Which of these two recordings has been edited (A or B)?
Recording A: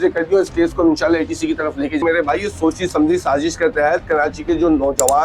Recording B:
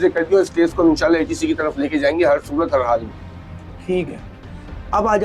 A